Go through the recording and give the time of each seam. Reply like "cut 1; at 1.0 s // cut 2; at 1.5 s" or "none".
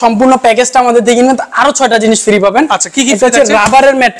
none